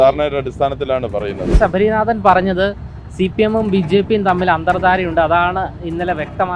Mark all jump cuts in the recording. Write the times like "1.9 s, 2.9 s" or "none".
1.5 s